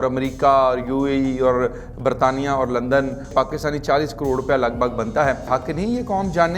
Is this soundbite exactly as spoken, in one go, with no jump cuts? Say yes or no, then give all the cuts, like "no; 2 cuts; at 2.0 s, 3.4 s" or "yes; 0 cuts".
no; 2 cuts; at 3.3 s, 5.5 s